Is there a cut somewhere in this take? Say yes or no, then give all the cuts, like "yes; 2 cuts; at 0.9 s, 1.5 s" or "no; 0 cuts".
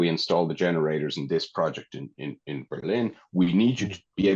no; 0 cuts